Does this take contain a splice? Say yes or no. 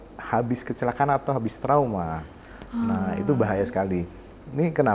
no